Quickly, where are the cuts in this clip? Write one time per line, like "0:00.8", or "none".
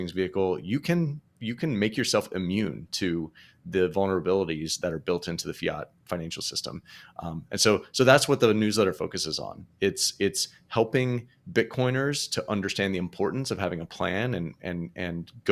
none